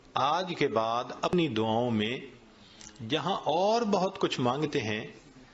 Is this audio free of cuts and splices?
no; 1 cut; at 1.3 s

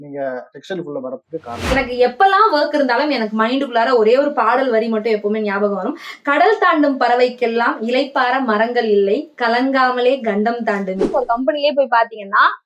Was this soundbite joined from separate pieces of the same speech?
yes; 2 cuts; at 1.7 s, 11.1 s

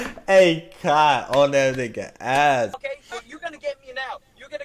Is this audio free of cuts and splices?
no; 1 cut; at 2.8 s

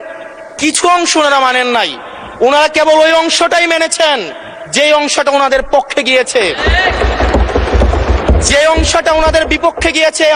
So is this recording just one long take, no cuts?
yes; 0 cuts

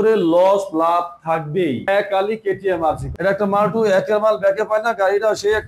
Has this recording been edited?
yes; 2 cuts; at 1.8 s, 3.1 s

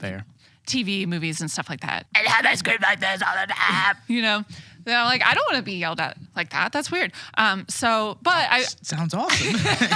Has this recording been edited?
yes; 1 cut; at 2.1 s

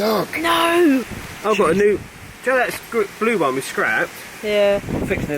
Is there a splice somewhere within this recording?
no; 0 cuts

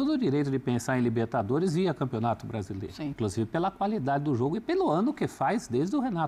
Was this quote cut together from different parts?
yes; 1 cut; at 3.1 s

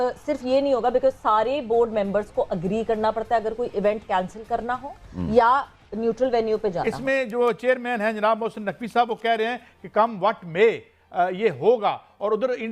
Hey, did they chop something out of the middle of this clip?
yes; 1 cut; at 6.9 s

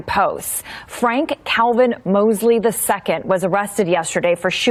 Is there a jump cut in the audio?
no; 0 cuts

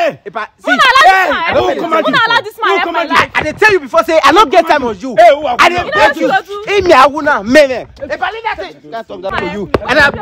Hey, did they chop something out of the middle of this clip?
yes; 1 cut; at 9.3 s

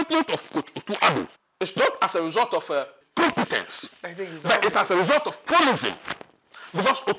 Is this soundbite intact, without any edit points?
no; 2 cuts; at 1.4 s, 3.0 s

